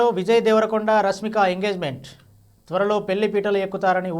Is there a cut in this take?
no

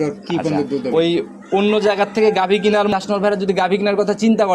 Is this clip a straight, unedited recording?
no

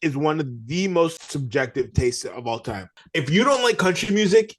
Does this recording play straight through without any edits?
no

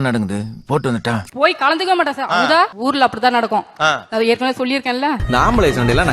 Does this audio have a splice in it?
yes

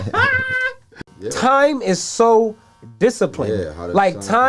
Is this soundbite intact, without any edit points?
no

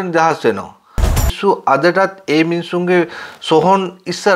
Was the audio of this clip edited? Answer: yes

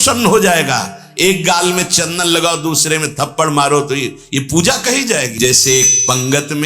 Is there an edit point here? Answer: yes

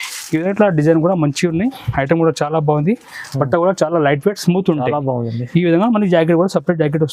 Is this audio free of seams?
yes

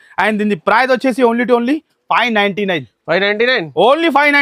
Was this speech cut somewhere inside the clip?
no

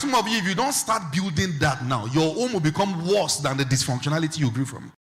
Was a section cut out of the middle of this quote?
no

